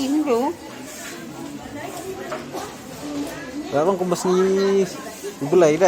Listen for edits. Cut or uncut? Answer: uncut